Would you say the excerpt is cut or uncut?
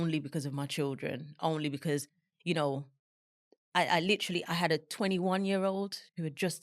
uncut